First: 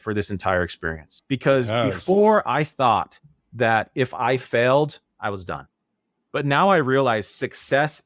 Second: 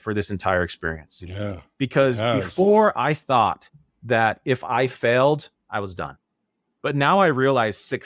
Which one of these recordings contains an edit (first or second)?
first